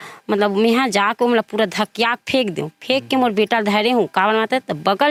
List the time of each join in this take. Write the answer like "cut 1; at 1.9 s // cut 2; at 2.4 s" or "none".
none